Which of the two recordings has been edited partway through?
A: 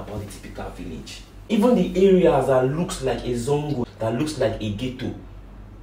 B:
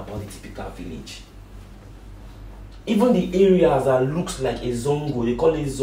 A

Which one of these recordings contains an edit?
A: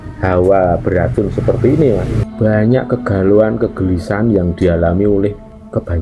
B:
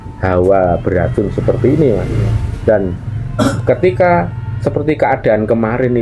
A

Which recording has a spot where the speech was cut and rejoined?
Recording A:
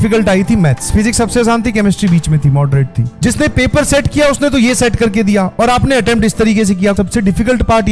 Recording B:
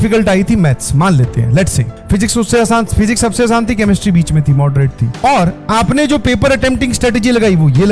A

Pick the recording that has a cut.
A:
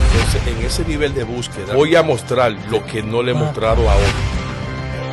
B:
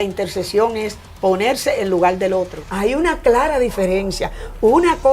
B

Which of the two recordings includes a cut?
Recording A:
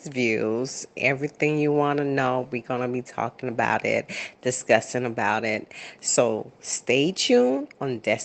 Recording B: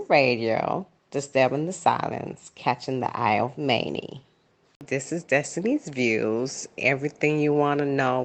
B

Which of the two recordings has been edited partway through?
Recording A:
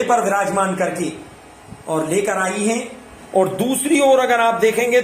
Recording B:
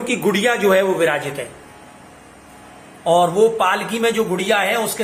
A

